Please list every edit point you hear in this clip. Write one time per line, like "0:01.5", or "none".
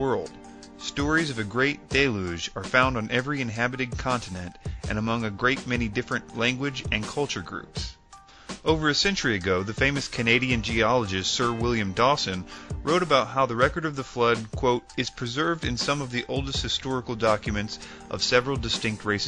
0:12.6